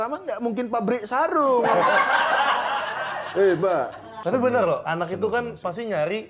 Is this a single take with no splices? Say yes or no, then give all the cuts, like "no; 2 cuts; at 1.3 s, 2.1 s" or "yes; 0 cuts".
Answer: no; 1 cut; at 4.0 s